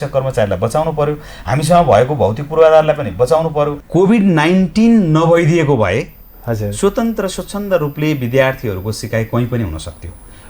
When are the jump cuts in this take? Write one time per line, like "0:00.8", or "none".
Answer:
0:03.8